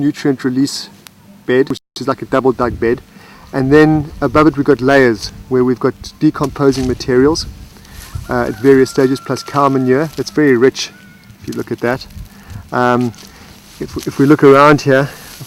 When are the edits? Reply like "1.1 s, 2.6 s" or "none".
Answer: 2.0 s